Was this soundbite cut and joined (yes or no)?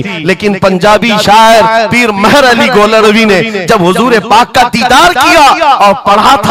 no